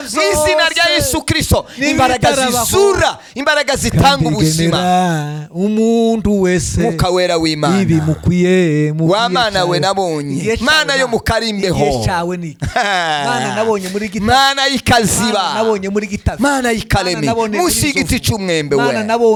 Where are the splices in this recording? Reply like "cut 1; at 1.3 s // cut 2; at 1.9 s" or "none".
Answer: none